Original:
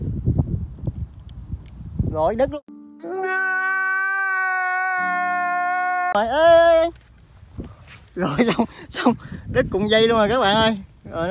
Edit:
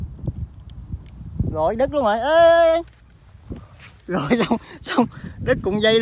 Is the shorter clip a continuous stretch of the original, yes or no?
no